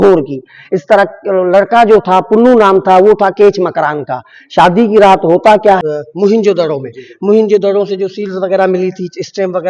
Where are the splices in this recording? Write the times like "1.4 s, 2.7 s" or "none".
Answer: 5.8 s